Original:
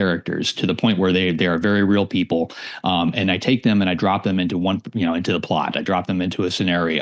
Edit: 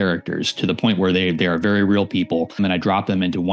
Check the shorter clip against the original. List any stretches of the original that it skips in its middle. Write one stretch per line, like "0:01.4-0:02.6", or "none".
0:02.6-0:03.8